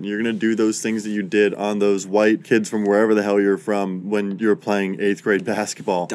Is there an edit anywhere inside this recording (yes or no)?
yes